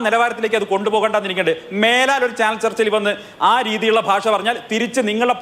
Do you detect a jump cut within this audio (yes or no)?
yes